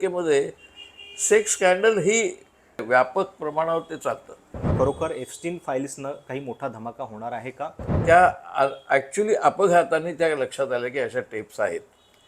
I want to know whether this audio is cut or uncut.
cut